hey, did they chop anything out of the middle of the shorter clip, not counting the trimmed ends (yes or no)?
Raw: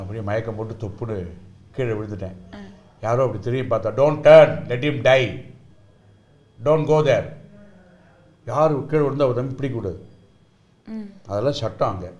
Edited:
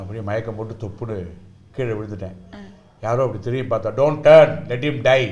no